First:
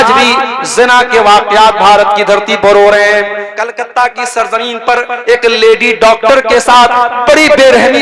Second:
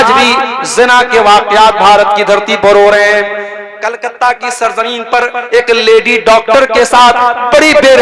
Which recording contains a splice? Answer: first; 1 cut; at 3.4 s

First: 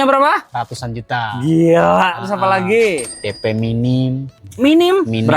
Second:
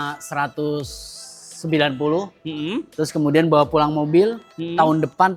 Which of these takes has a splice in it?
first; 1 cut; at 3.1 s

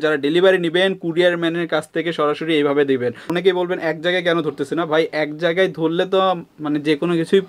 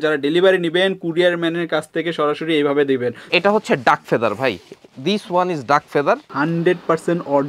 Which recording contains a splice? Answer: second; 2 cuts; at 3.2 s, 6.3 s

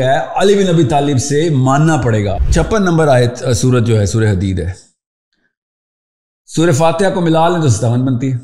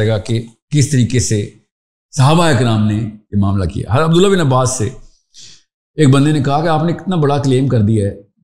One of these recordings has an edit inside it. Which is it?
first; 1 cut; at 2.4 s

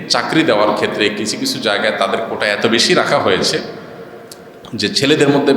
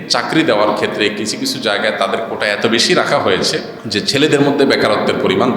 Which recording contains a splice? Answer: second; 1 cut; at 3.8 s

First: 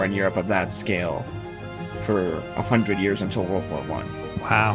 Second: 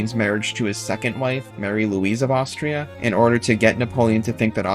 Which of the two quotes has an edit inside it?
second; 2 cuts; at 1.5 s, 2.9 s

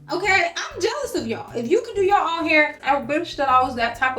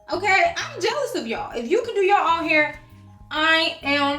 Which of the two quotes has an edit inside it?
first; 1 cut; at 2.8 s

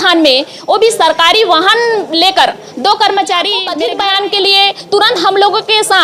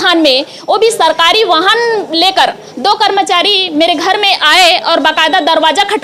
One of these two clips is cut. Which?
first; 1 cut; at 3.7 s

